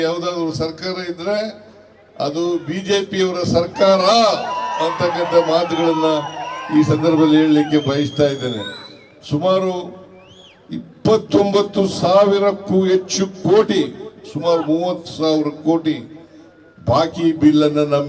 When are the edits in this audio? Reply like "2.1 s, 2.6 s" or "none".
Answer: none